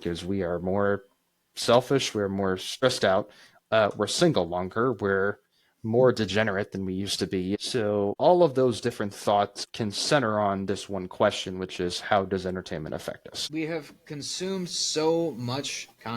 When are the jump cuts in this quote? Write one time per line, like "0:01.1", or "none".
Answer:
0:02.7
0:07.6
0:09.6
0:13.3